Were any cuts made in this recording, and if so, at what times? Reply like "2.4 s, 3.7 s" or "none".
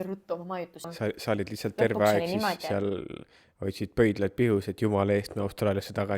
0.9 s